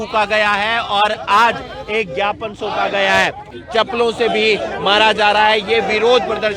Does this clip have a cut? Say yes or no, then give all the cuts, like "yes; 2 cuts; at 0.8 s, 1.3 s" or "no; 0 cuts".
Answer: yes; 1 cut; at 3.6 s